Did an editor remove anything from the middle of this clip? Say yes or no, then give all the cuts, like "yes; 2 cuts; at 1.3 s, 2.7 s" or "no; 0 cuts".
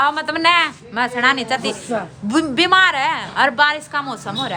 no; 0 cuts